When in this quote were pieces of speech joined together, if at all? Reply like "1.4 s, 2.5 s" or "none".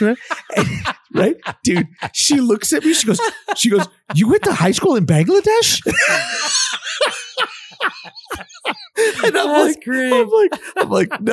8.8 s